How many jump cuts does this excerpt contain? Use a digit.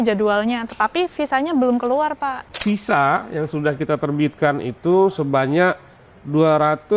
1